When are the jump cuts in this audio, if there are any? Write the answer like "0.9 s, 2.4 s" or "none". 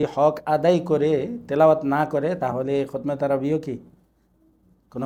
none